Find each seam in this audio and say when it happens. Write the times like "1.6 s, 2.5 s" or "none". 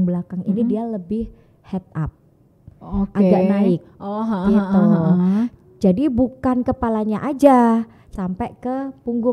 8.1 s